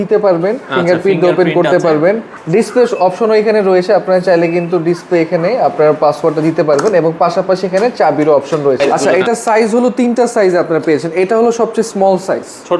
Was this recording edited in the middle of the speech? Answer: yes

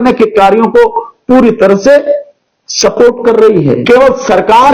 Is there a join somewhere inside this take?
yes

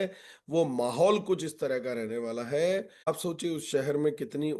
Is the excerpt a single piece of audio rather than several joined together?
no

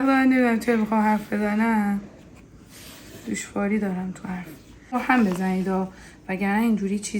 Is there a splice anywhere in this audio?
yes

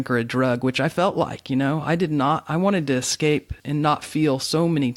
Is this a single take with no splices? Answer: no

